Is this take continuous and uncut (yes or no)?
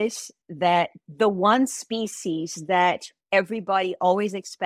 no